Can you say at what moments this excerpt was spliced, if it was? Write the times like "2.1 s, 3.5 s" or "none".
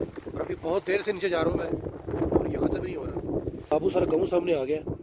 3.7 s